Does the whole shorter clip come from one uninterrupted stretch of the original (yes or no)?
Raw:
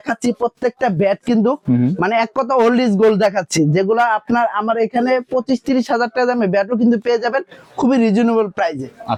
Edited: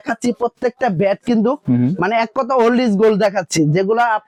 yes